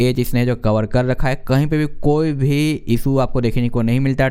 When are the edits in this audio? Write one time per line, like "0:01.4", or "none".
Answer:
none